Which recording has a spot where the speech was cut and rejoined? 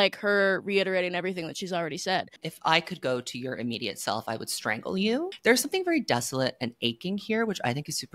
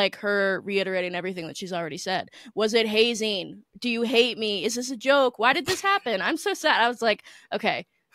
first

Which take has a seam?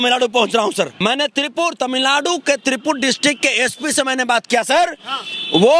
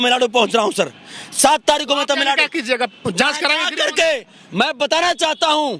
first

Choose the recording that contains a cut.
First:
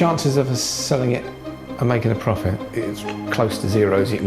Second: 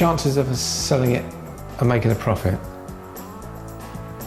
first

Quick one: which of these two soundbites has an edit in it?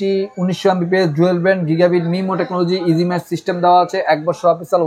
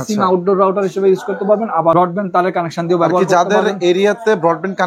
second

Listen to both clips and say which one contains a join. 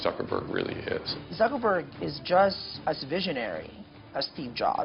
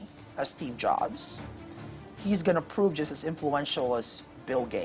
first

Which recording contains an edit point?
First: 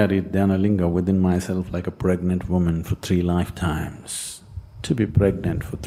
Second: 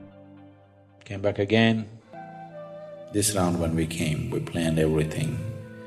second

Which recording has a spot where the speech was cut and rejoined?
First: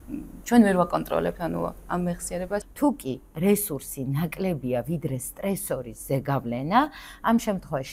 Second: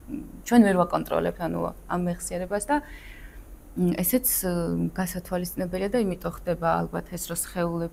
first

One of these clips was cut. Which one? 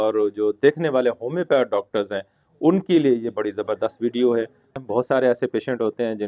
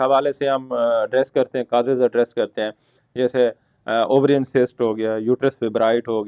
first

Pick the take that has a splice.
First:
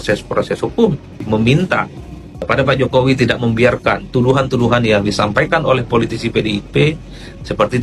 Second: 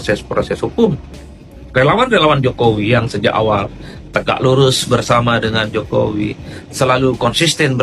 first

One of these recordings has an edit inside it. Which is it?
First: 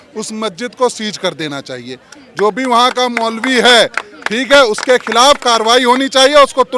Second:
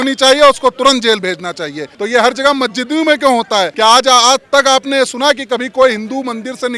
second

